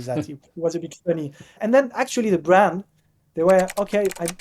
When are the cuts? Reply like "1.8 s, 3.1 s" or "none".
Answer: 1.6 s